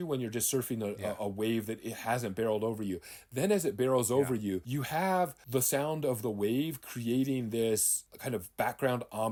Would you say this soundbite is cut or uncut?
uncut